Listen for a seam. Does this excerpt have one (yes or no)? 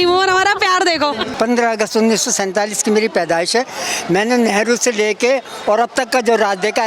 yes